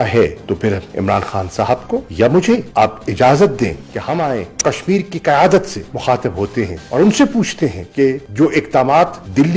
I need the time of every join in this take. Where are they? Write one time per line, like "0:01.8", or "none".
none